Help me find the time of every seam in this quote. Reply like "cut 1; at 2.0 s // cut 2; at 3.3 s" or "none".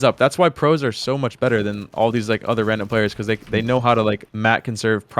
cut 1; at 4.3 s